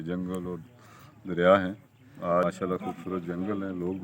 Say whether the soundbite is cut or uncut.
cut